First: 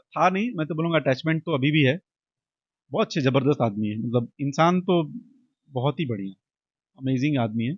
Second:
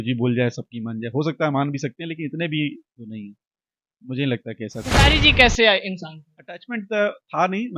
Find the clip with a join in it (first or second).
second